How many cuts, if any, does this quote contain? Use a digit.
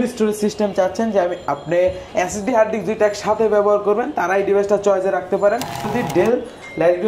1